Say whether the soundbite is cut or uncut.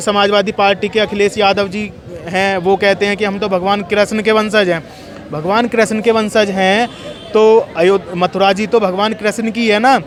uncut